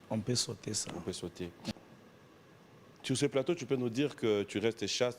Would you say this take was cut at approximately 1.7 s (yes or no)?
yes